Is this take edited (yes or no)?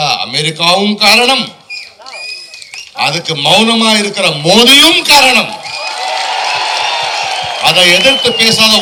no